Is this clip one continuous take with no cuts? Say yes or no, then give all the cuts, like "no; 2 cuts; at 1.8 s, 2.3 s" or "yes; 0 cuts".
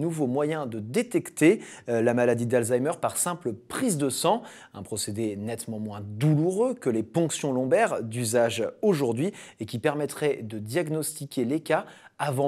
no; 1 cut; at 11.2 s